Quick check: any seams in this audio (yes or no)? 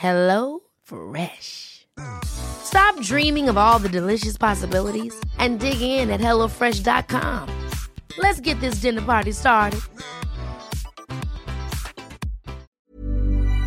yes